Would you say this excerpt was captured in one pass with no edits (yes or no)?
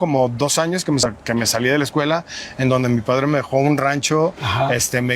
no